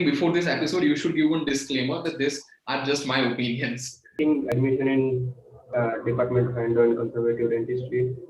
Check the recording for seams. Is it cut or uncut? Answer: cut